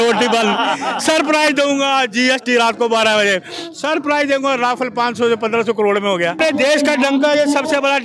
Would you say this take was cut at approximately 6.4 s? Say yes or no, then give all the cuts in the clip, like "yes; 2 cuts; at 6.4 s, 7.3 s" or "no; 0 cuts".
yes; 1 cut; at 6.4 s